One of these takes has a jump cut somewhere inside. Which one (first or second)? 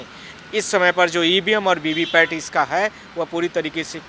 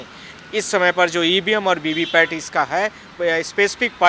second